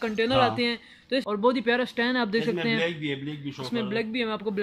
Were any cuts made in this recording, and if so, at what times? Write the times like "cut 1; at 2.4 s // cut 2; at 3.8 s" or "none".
cut 1; at 1.2 s

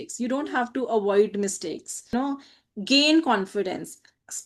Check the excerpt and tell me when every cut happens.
cut 1; at 2.1 s

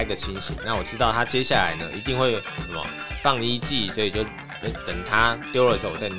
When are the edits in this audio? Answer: none

